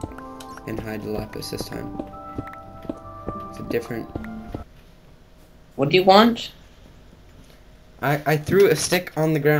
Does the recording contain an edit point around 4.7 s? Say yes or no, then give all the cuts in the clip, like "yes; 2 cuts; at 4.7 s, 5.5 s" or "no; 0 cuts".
yes; 1 cut; at 4.7 s